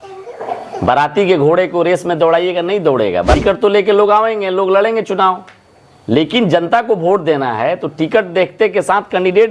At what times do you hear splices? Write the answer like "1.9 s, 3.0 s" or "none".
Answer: 3.3 s

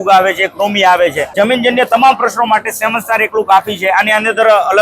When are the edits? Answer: 1.3 s

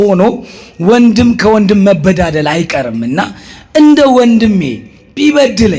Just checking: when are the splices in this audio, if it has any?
none

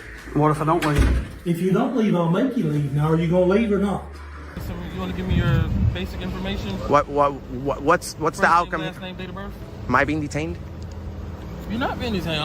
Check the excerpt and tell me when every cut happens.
4.7 s

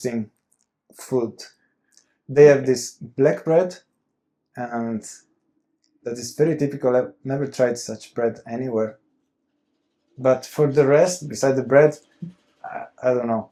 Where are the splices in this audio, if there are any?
none

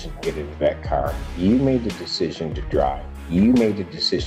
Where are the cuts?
none

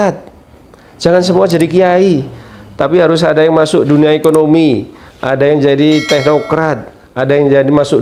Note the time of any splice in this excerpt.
none

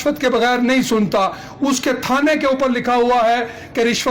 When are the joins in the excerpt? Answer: none

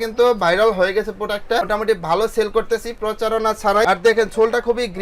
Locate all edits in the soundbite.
3.8 s

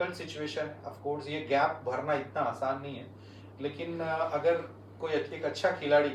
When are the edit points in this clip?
none

